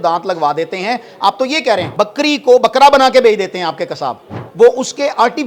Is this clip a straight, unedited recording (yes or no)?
no